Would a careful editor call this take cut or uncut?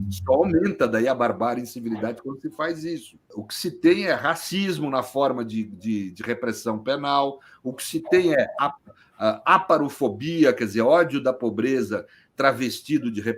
cut